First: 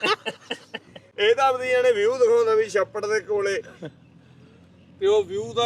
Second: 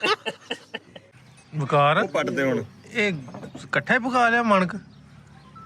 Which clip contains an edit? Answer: second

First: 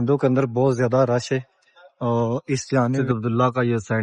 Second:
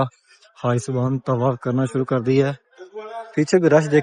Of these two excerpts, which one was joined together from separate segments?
first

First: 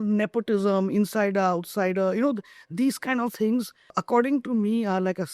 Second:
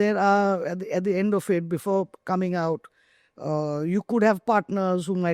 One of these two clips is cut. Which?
first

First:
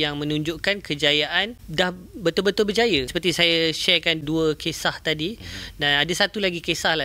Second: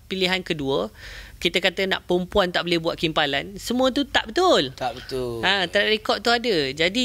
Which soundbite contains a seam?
first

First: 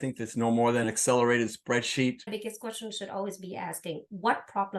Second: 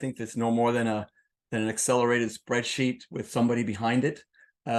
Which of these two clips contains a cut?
first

